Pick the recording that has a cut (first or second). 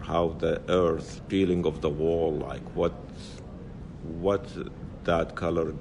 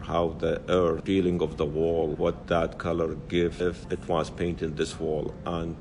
second